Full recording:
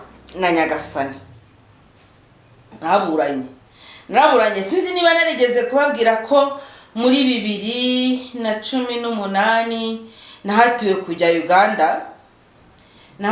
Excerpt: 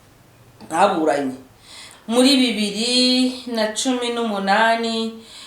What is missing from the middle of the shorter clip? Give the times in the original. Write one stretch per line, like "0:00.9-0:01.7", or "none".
0:03.9-0:06.7